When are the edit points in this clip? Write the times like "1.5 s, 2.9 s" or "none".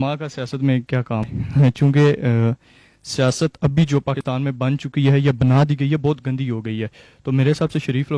1.3 s, 4.2 s